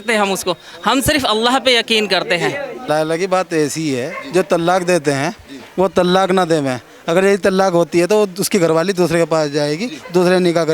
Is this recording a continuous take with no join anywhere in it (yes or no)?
no